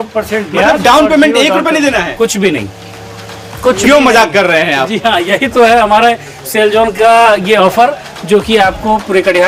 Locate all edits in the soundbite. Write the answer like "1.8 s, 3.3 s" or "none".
none